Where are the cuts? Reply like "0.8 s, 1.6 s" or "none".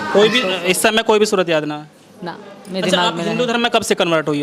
none